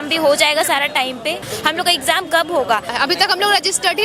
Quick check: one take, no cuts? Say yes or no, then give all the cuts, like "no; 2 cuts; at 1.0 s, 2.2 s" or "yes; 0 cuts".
no; 2 cuts; at 1.5 s, 2.9 s